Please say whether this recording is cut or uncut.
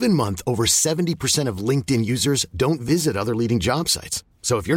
uncut